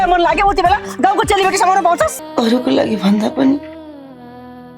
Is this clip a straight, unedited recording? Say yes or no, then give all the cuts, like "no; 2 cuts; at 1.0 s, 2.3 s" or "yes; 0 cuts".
no; 1 cut; at 2.2 s